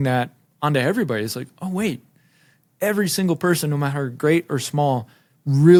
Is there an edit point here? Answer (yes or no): no